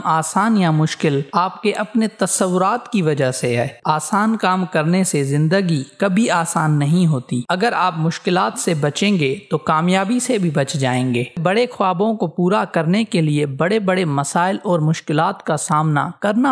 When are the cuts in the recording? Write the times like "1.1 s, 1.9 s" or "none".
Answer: 3.8 s, 7.4 s, 11.4 s